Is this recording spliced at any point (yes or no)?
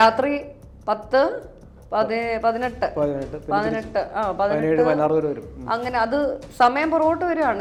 no